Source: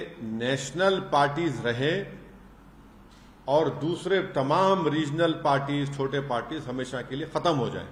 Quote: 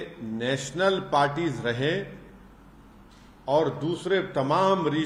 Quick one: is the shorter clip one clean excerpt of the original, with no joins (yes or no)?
yes